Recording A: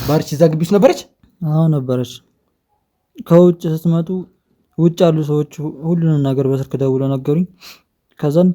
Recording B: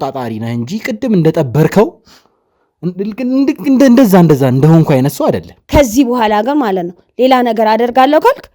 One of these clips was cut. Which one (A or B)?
B